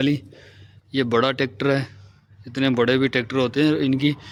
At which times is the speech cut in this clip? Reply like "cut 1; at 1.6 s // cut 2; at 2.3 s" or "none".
none